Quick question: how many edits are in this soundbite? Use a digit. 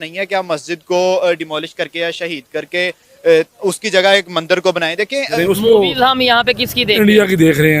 1